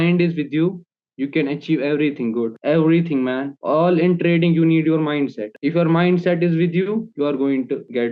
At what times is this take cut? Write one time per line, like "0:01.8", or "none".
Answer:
none